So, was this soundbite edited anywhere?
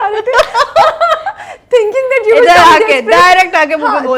no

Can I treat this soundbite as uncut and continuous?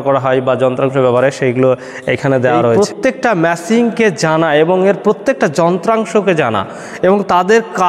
no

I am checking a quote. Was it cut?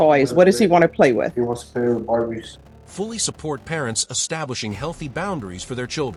no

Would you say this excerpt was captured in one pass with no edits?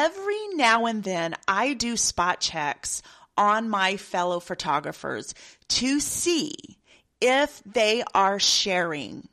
yes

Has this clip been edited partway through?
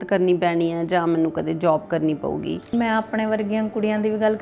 yes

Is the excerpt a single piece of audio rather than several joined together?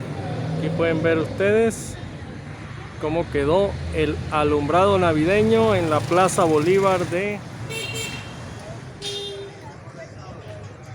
no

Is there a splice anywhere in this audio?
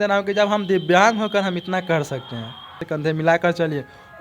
yes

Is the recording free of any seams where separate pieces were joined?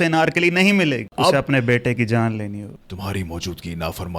no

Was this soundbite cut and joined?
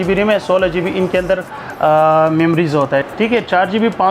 yes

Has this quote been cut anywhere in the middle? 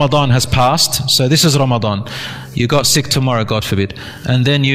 no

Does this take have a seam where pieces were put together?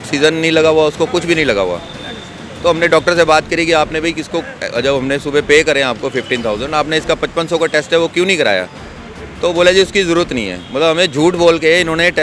no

